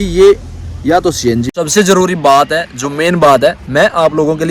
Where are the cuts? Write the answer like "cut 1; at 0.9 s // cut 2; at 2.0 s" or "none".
cut 1; at 1.5 s